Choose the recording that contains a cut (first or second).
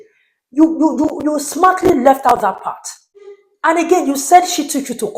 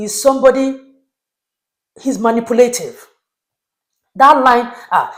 first